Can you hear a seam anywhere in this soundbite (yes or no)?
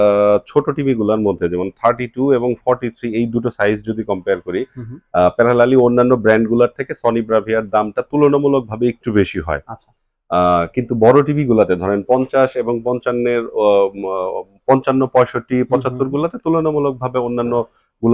no